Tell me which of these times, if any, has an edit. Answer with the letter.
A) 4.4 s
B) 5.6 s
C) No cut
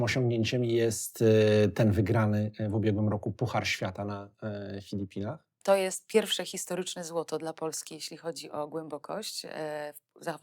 B